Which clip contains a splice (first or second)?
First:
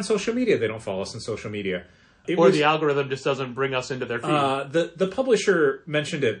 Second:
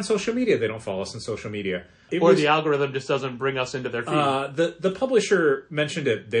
second